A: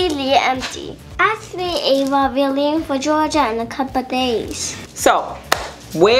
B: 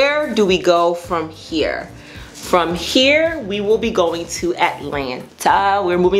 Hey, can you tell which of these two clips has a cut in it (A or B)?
A